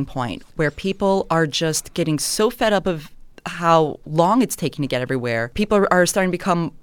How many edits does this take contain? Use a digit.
1